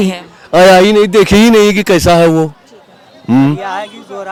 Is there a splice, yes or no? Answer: no